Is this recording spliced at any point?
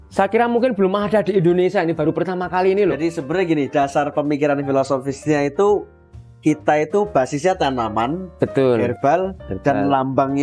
no; 0 cuts

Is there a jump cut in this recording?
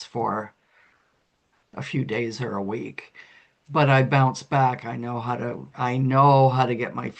no; 0 cuts

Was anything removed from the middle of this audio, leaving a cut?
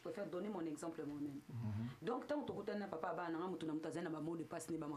no; 0 cuts

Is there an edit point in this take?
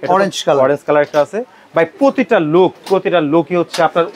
no; 0 cuts

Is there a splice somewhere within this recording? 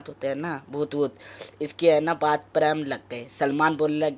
no; 0 cuts

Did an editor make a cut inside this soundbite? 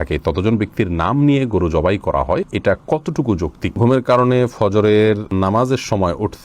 yes; 3 cuts; at 2.5 s, 3.8 s, 5.3 s

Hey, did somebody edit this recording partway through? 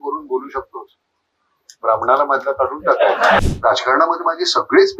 yes; 1 cut; at 3.4 s

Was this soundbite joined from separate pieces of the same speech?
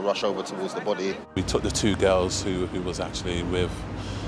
yes; 1 cut; at 1.3 s

